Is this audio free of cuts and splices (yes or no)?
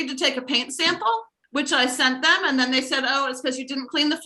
no